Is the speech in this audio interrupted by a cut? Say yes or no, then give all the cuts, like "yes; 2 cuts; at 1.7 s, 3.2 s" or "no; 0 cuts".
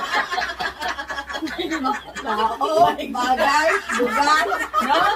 no; 0 cuts